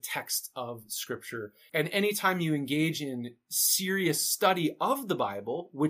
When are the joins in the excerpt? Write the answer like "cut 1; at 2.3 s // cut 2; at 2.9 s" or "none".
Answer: cut 1; at 1.6 s